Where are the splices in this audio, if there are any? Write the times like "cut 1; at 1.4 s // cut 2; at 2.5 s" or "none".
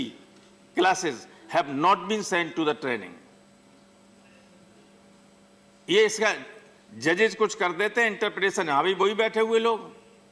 none